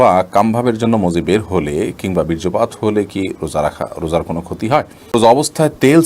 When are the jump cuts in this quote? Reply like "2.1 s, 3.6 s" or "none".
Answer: 5.1 s